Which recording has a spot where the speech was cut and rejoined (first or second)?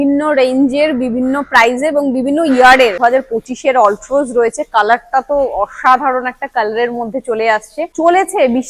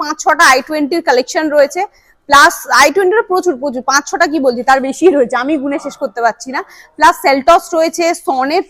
first